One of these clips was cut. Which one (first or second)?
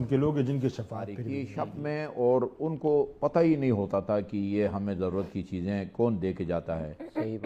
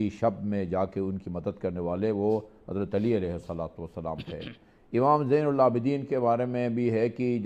first